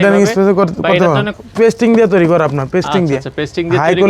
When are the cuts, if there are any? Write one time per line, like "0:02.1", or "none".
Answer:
0:01.4